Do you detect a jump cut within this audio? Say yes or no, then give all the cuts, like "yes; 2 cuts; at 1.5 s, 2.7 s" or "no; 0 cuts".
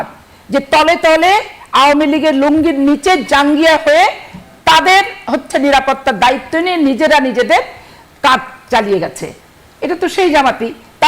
no; 0 cuts